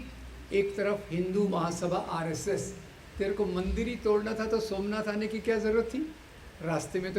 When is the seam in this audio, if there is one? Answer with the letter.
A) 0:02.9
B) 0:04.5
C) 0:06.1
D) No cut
A